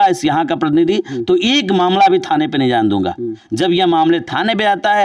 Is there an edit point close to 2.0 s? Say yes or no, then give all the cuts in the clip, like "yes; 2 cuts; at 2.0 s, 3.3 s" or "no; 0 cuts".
no; 1 cut; at 3.4 s